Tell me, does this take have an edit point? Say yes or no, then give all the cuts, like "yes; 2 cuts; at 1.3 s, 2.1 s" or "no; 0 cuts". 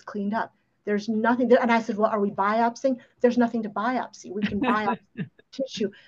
no; 0 cuts